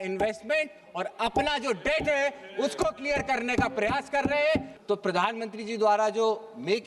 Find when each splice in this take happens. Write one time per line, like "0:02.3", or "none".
0:04.7